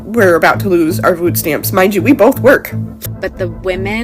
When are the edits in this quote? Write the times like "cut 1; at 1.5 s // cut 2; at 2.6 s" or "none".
cut 1; at 3.0 s